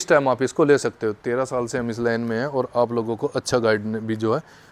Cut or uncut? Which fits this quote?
uncut